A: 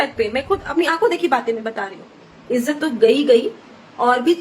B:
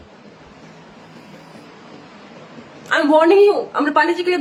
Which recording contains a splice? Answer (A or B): A